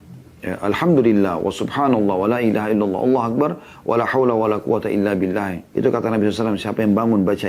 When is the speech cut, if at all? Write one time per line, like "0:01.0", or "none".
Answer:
0:05.6